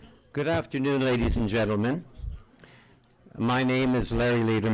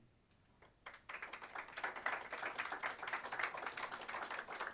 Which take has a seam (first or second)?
second